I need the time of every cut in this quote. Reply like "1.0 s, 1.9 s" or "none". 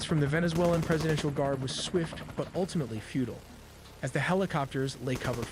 none